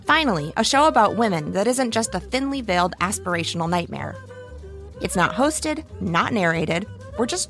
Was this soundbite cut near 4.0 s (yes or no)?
yes